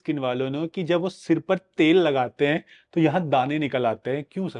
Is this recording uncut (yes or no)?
yes